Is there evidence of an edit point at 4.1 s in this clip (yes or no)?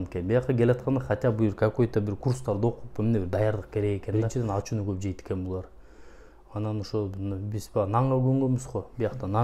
yes